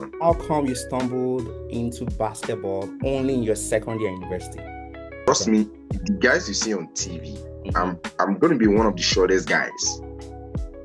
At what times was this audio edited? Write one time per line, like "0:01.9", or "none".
0:05.1